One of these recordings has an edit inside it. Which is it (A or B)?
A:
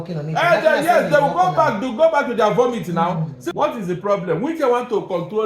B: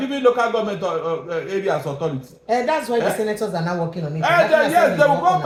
A